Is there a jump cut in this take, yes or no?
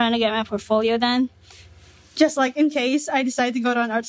no